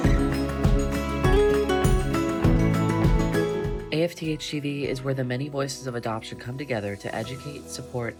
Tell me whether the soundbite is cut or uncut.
uncut